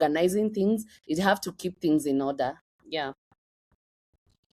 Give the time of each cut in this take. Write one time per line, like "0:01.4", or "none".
none